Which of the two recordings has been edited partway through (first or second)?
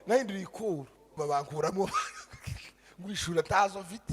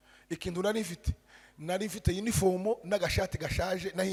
first